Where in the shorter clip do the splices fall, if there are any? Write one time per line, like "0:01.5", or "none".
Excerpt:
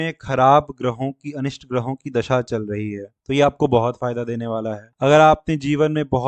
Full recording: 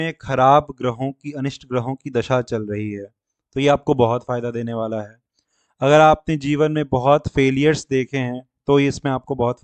0:03.1
0:04.8